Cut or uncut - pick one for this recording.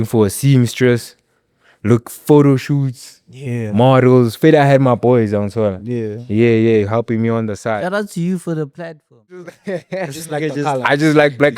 cut